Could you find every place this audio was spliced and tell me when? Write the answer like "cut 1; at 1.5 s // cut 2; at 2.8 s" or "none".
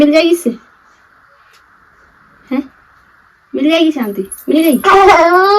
none